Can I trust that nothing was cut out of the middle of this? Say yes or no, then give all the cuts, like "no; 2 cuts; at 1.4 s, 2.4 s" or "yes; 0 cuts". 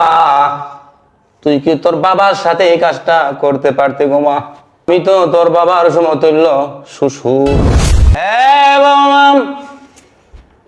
no; 1 cut; at 4.9 s